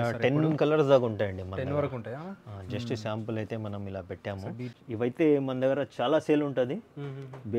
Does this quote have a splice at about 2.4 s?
no; 1 cut; at 4.7 s

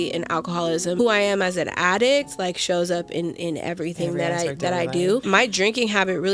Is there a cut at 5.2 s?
yes; 2 cuts; at 1.0 s, 5.2 s

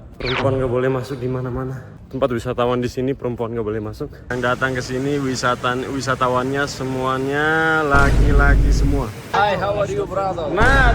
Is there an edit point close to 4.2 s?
yes; 2 cuts; at 4.2 s, 9.3 s

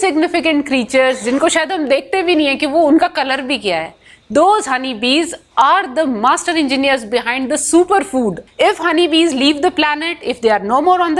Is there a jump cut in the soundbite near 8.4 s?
yes; 1 cut; at 8.4 s

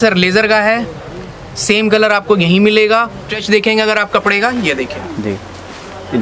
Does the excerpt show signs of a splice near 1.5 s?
no; 1 cut; at 3.2 s

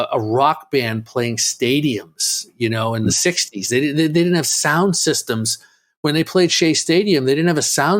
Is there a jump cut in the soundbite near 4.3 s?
no; 0 cuts

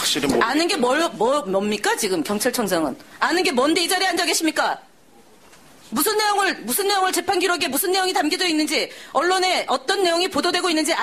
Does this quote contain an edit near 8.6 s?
no; 1 cut; at 4.6 s

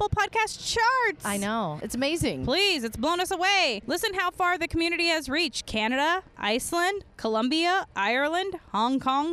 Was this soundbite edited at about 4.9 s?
no; 1 cut; at 1.8 s

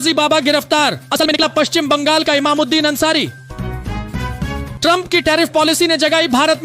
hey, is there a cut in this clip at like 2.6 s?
no; 1 cut; at 1.2 s

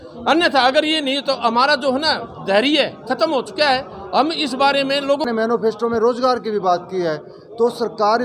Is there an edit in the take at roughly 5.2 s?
yes; 1 cut; at 5.2 s

